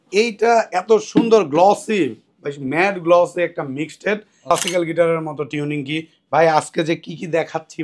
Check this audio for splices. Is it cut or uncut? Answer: cut